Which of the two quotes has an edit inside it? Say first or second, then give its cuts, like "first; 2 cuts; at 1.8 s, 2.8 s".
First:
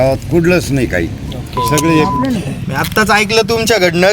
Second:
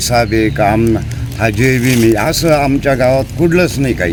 first; 1 cut; at 2.1 s